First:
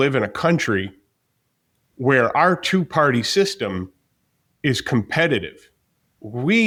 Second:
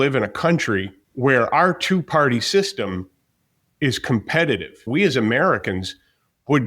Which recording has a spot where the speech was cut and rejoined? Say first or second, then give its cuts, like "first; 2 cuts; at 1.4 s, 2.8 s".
second; 2 cuts; at 1.0 s, 4.9 s